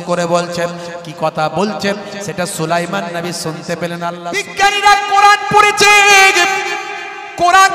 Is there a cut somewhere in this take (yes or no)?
yes